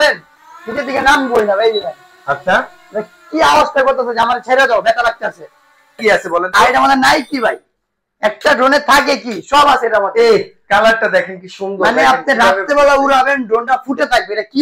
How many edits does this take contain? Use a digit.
1